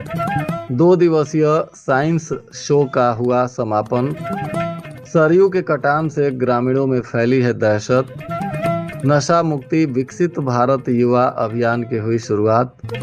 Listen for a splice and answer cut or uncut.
uncut